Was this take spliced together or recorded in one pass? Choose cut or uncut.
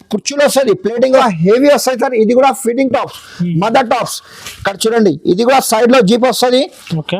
cut